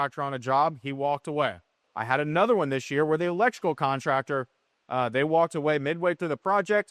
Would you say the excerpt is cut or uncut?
cut